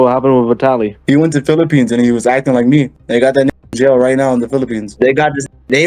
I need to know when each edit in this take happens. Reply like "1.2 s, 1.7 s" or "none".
0.9 s, 3.0 s, 4.9 s